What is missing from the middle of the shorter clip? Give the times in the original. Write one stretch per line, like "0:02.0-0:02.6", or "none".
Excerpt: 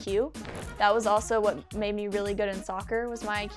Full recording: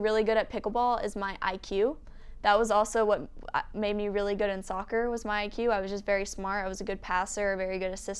0:03.3-0:03.7